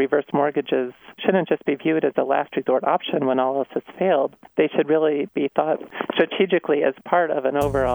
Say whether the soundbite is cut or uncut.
cut